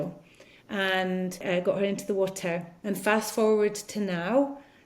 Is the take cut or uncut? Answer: cut